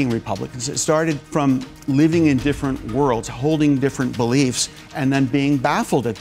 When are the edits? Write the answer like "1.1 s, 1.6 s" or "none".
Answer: 1.2 s